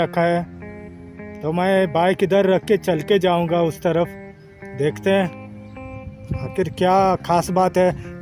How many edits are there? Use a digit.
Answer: 0